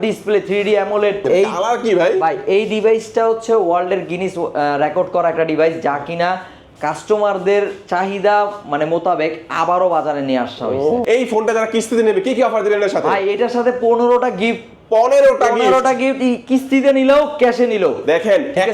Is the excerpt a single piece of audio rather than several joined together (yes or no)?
no